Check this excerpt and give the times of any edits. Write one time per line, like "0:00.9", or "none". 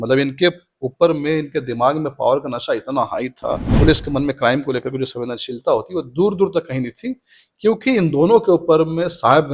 0:03.7